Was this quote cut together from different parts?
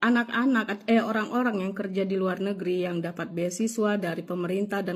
no; 0 cuts

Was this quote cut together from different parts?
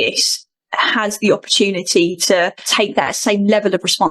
yes; 1 cut; at 2.6 s

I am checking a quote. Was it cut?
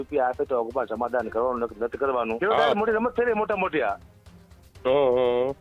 yes; 1 cut; at 2.4 s

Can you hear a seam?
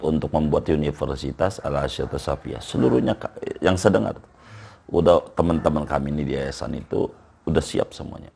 no; 0 cuts

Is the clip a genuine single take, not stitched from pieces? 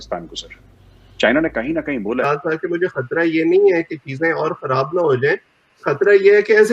no; 1 cut; at 2.2 s

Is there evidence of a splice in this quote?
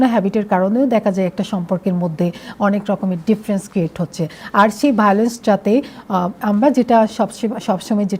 no; 0 cuts

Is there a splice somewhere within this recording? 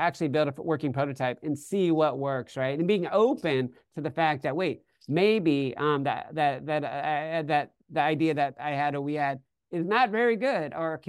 no; 0 cuts

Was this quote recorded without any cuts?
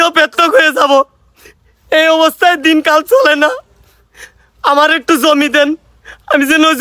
yes; 0 cuts

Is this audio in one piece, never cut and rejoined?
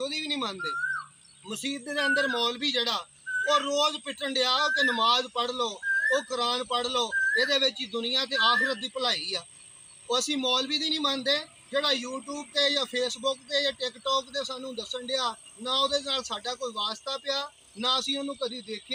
yes; 0 cuts

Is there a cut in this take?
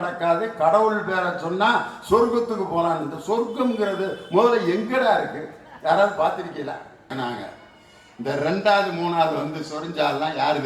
yes; 1 cut; at 7.1 s

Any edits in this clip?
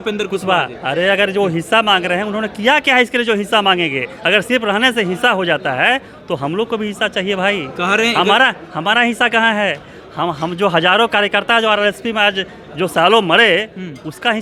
no; 0 cuts

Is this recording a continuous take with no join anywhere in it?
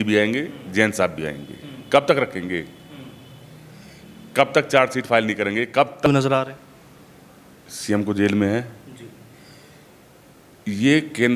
no; 1 cut; at 6.1 s

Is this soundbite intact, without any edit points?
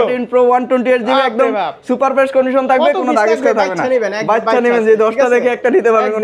yes; 0 cuts

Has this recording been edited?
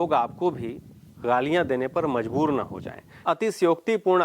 yes; 1 cut; at 3.2 s

